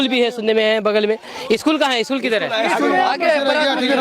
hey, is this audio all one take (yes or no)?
yes